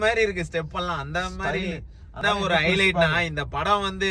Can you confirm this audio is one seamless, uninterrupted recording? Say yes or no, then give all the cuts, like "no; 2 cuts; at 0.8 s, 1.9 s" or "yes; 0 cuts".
no; 1 cut; at 2.1 s